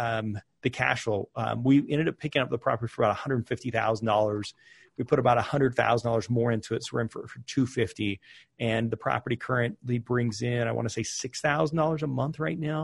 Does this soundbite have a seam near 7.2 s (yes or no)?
no